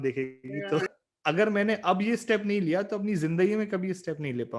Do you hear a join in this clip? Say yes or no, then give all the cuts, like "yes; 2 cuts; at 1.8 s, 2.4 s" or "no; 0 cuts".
yes; 1 cut; at 0.9 s